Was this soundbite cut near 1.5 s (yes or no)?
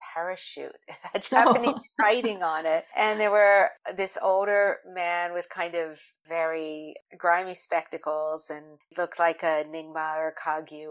no